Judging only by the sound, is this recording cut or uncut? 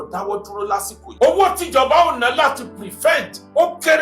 cut